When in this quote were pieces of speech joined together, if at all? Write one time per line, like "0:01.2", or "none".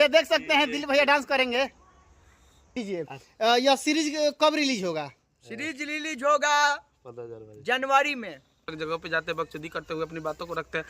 0:02.8
0:08.7